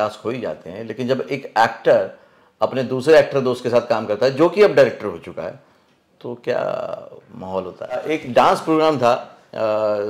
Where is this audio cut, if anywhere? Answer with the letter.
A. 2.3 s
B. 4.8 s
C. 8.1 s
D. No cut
C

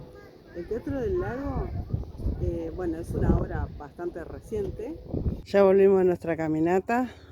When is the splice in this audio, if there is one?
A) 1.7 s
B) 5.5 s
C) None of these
B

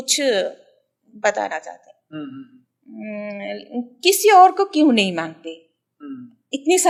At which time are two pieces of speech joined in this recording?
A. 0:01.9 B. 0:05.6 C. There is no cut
C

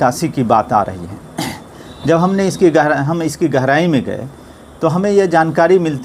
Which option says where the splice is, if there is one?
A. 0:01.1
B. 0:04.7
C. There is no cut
C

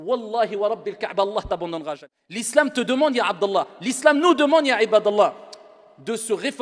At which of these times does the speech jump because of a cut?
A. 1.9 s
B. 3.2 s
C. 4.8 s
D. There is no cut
A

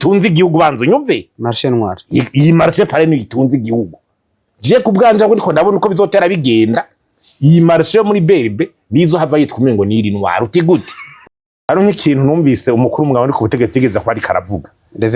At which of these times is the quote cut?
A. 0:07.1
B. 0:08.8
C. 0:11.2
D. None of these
C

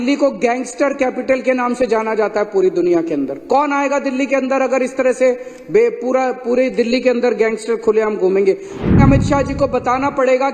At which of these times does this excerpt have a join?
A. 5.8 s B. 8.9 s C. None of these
B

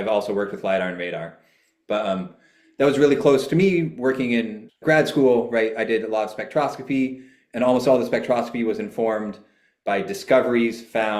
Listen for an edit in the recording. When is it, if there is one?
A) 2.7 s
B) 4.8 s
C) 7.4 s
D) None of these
B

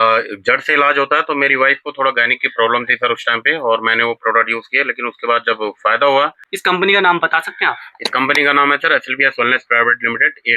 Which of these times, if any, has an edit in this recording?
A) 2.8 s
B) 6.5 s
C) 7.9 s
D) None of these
B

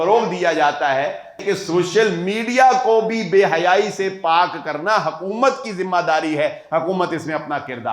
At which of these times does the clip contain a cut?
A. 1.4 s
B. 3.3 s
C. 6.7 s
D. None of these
A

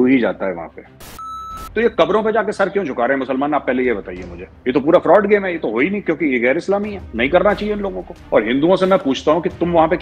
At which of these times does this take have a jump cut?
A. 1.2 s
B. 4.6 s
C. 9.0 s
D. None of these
A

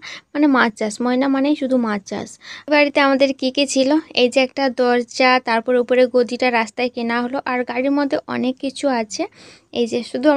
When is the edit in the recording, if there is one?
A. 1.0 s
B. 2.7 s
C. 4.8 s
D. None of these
B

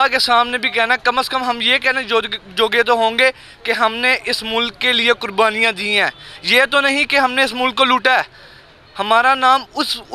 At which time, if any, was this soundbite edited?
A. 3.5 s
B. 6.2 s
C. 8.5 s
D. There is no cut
D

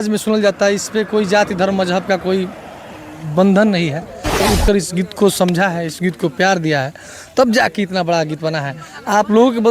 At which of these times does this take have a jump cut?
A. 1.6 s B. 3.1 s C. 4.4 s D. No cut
C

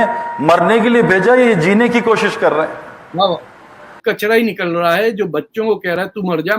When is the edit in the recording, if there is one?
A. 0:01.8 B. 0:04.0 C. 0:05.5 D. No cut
B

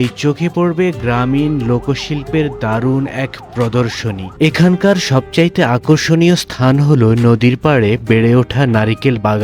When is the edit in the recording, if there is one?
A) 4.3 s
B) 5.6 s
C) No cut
A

